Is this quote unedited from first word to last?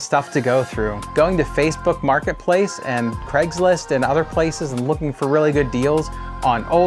no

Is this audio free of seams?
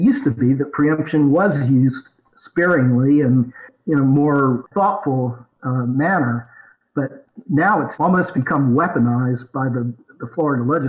no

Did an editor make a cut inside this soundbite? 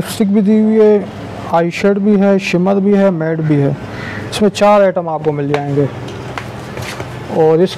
no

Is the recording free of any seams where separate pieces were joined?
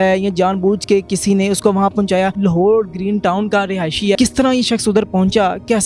no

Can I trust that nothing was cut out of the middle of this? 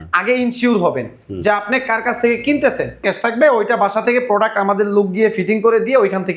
no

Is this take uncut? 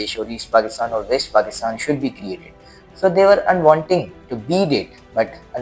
yes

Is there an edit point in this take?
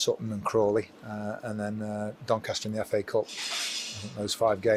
no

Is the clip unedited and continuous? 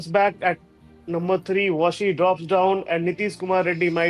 yes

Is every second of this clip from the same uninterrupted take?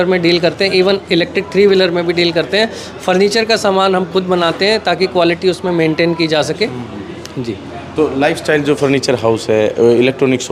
yes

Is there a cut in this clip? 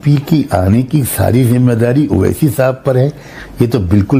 no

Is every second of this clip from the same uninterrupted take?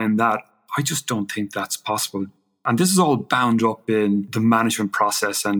no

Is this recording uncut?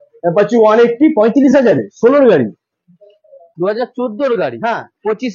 no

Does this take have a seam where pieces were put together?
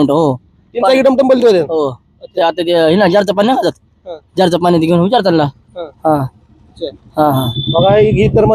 no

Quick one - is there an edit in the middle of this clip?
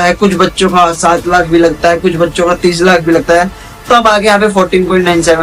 no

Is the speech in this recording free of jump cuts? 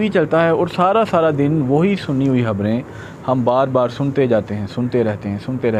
yes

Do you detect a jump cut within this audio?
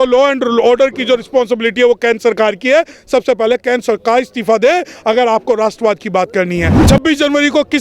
yes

